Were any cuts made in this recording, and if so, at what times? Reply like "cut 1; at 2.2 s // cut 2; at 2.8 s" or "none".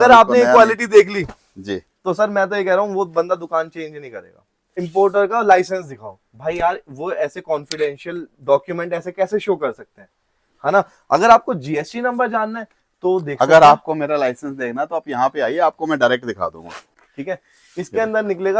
cut 1; at 4.8 s // cut 2; at 17.0 s